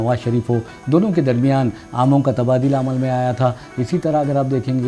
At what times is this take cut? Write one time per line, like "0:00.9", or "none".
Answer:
none